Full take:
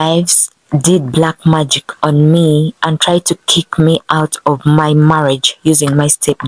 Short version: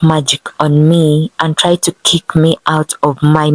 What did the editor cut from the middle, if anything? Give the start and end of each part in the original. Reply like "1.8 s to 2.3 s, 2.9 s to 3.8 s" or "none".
none